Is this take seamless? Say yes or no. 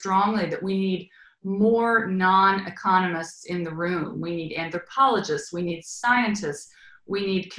yes